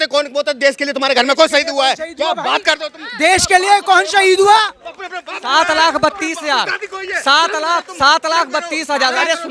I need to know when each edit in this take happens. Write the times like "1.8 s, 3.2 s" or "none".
none

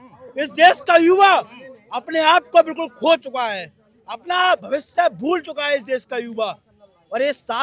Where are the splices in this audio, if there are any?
none

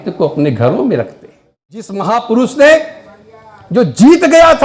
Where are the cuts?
2.0 s

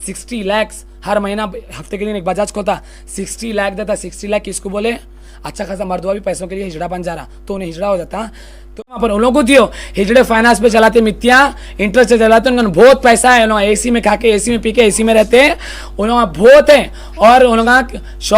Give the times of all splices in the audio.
9.0 s

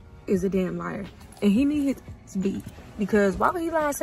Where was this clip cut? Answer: none

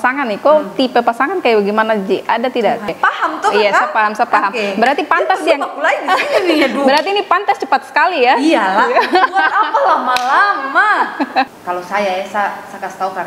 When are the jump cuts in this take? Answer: 2.9 s, 11.5 s

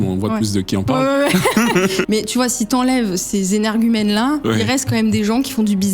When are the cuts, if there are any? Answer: 2.0 s

